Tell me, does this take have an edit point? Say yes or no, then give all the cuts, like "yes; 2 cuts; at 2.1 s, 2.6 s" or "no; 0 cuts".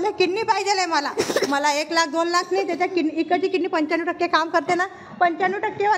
no; 0 cuts